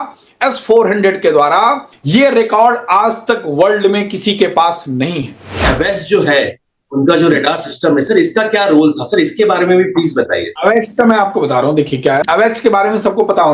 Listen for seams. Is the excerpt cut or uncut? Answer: cut